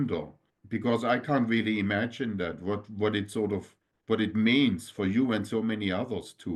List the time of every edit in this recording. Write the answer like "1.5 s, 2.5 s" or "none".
none